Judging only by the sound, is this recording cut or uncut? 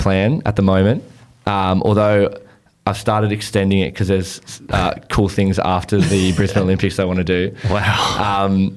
uncut